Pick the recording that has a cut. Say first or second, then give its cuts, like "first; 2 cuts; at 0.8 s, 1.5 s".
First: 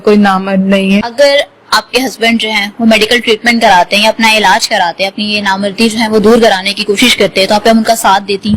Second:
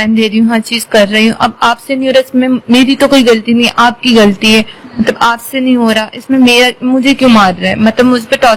first; 1 cut; at 1.1 s